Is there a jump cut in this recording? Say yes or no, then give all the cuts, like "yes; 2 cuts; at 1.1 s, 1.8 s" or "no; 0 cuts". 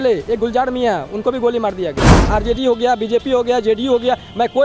yes; 1 cut; at 2.1 s